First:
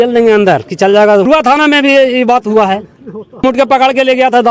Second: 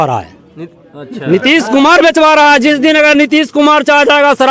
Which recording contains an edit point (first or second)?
first